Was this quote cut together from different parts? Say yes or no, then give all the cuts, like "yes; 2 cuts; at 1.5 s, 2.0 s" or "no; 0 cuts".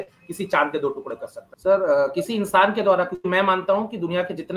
yes; 1 cut; at 1.4 s